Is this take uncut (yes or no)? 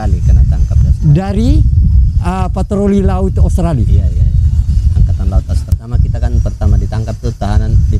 no